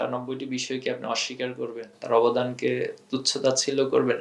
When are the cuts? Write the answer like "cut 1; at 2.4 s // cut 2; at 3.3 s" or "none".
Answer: none